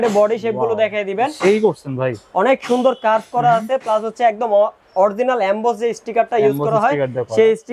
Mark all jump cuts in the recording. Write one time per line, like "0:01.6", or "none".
none